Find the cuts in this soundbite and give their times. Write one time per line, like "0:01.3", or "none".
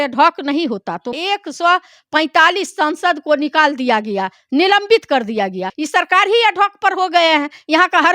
0:01.1
0:05.7